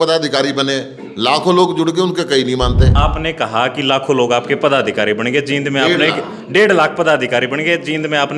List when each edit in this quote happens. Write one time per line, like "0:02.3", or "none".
0:02.9